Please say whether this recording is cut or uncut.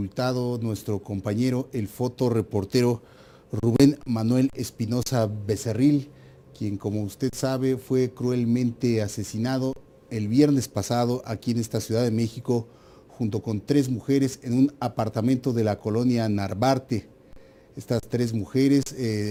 uncut